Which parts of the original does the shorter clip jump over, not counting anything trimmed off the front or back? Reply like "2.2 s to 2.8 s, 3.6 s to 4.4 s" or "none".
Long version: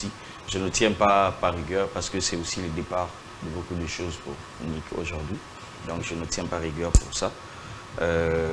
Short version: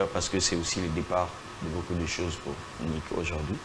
none